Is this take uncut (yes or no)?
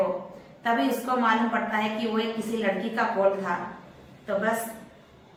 yes